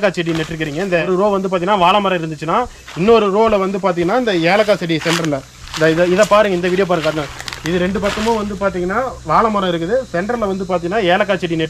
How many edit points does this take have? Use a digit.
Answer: 0